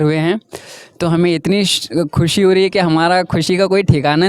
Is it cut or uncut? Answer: uncut